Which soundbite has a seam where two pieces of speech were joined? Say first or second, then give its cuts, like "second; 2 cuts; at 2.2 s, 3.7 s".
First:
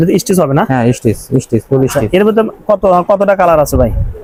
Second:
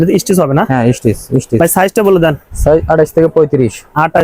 second; 1 cut; at 1.6 s